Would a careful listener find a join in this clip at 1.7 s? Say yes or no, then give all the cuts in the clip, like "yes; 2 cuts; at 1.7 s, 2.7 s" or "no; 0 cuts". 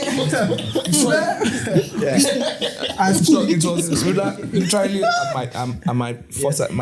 no; 0 cuts